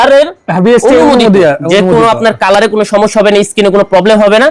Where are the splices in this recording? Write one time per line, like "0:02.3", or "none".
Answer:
none